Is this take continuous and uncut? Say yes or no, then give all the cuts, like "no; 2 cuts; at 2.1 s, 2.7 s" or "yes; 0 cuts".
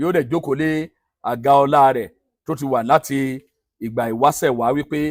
yes; 0 cuts